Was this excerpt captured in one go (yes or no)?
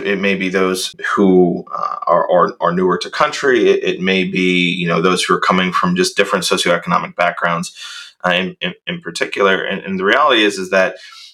no